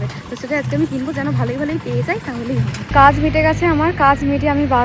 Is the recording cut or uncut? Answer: cut